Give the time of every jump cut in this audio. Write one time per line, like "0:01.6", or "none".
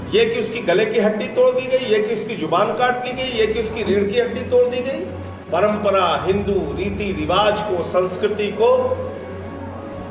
0:05.4